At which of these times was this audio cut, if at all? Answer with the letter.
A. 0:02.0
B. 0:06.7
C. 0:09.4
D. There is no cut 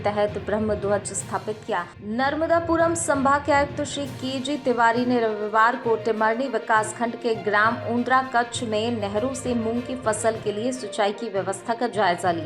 A